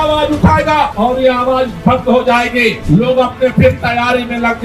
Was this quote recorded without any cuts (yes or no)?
yes